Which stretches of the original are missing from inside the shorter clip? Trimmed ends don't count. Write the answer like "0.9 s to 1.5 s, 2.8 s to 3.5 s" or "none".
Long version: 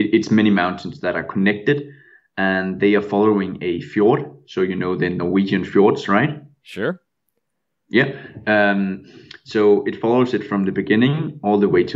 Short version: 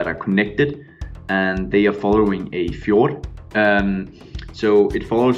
4.4 s to 8.2 s